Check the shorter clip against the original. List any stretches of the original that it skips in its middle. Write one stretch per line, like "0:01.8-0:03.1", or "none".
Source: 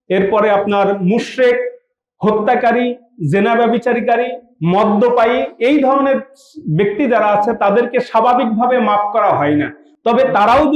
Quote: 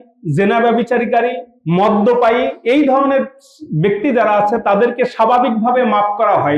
none

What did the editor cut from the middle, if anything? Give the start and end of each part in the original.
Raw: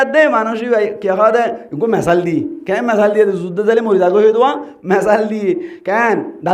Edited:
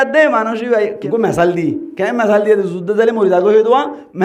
0:01.0-0:01.7

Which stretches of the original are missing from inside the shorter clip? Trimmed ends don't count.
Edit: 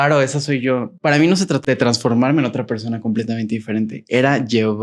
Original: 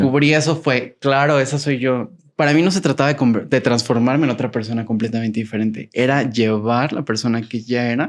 0:02.1-0:02.3
0:03.0-0:03.5

